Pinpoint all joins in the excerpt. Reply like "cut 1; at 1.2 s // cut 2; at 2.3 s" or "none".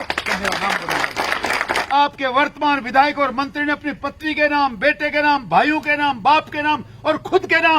cut 1; at 1.7 s